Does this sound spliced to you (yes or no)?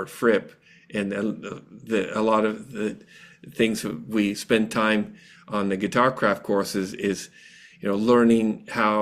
no